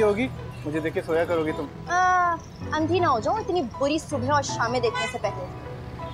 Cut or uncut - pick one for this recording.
uncut